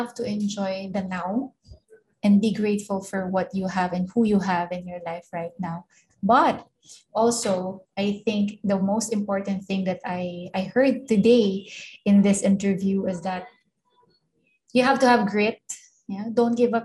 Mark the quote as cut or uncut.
uncut